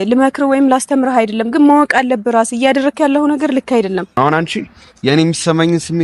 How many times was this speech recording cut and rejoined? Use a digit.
1